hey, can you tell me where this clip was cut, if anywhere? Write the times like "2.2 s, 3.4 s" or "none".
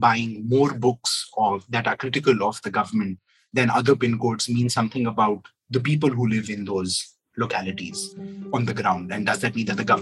8.4 s